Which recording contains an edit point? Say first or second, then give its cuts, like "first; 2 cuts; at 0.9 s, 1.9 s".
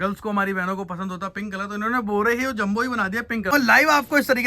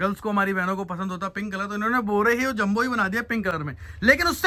first; 1 cut; at 3.5 s